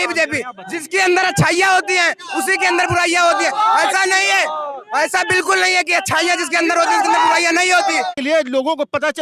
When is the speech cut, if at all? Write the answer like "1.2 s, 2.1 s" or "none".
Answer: 8.1 s

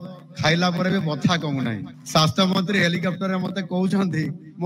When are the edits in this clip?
1.9 s

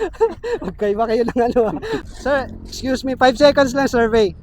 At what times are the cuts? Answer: 2.1 s

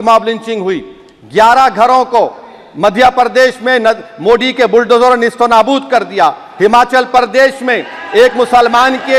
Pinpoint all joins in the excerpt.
none

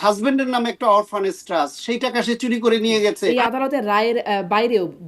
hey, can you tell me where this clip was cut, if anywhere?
3.2 s

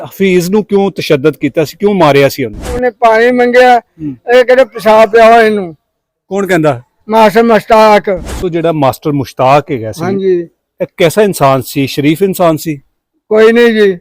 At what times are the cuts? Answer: 2.8 s, 8.4 s

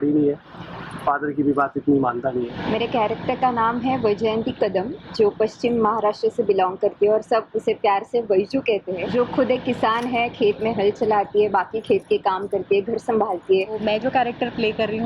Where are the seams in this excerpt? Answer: 2.5 s, 9.0 s, 13.8 s

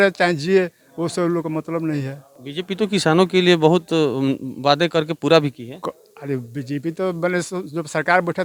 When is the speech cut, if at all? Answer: none

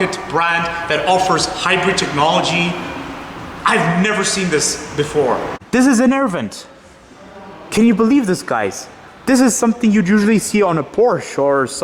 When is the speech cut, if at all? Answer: 5.5 s

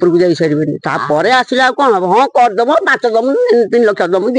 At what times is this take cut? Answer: none

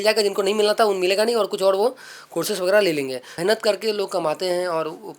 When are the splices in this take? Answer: 3.3 s

